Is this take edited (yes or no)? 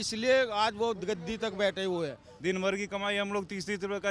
yes